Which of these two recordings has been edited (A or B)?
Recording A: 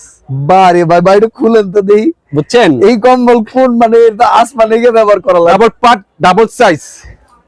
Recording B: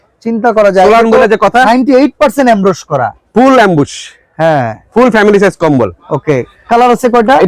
A